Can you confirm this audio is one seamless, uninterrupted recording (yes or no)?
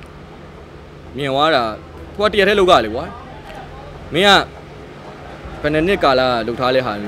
yes